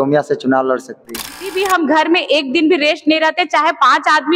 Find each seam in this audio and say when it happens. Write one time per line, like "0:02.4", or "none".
0:01.5